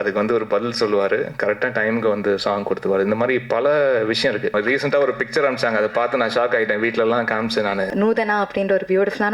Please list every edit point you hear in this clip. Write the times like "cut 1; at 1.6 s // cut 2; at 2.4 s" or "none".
cut 1; at 4.5 s // cut 2; at 7.9 s